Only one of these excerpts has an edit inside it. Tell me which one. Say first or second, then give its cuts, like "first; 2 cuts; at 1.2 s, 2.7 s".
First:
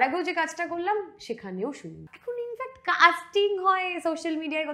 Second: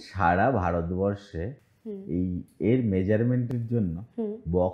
first; 1 cut; at 2.2 s